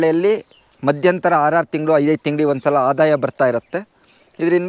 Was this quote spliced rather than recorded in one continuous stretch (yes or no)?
no